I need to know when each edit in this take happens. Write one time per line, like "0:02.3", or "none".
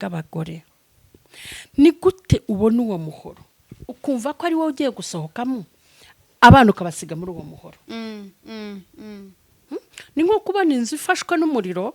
none